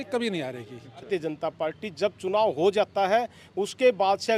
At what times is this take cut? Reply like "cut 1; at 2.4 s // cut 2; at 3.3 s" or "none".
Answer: cut 1; at 1.1 s